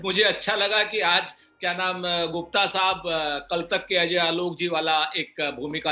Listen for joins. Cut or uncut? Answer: uncut